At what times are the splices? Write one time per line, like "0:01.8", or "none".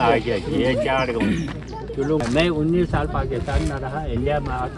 0:02.2